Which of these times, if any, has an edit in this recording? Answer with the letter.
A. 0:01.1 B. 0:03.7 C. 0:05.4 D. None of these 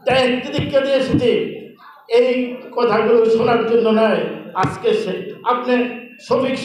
D